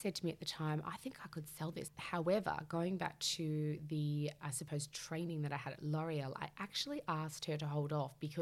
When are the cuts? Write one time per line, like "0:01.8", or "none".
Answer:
0:01.9